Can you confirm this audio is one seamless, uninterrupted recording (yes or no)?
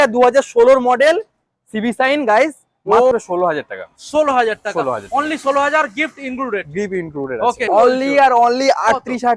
no